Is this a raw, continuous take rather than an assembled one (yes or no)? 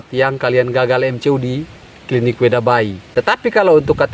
no